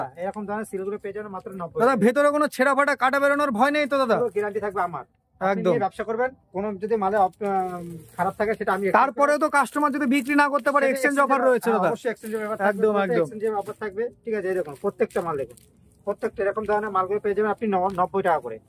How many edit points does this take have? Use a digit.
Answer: 0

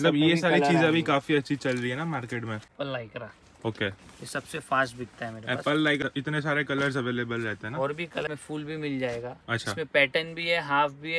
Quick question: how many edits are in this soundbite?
3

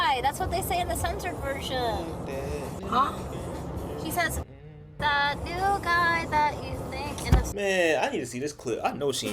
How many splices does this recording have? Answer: 0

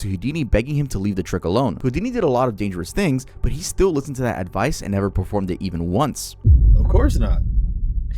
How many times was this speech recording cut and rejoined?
1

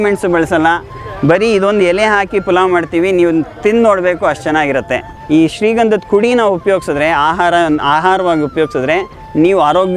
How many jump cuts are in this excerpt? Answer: 1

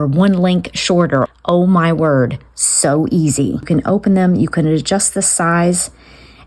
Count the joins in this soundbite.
2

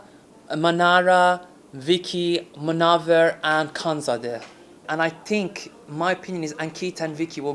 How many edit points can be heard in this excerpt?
1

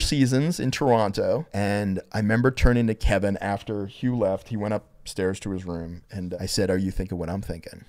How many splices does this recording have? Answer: 2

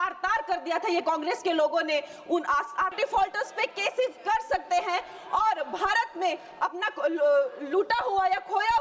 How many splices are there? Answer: 1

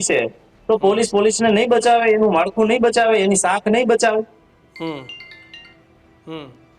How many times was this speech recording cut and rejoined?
0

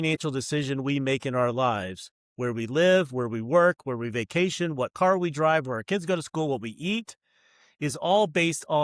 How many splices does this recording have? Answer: 0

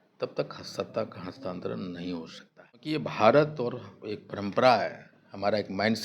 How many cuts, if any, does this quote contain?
1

